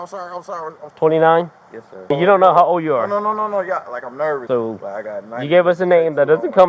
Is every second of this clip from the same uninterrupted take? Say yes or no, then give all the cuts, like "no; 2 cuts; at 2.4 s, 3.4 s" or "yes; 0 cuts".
no; 3 cuts; at 0.8 s, 2.1 s, 4.4 s